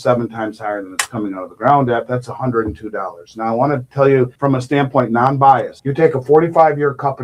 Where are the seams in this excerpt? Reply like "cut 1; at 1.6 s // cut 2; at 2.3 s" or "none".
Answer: cut 1; at 4.3 s